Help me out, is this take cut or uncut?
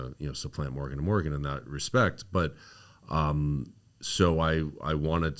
uncut